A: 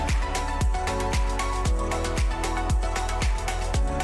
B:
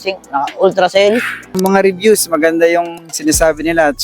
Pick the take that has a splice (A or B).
B